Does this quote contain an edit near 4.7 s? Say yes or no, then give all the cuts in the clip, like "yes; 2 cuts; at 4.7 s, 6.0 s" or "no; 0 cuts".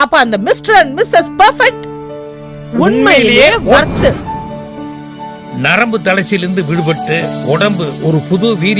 no; 0 cuts